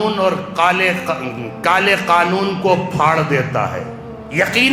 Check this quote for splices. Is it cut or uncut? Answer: uncut